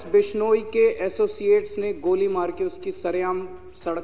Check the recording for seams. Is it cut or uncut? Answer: uncut